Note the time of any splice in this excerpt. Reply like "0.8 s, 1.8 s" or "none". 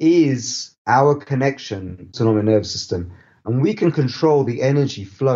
none